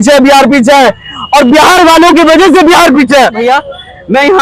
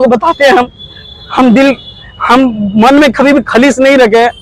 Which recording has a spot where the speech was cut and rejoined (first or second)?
first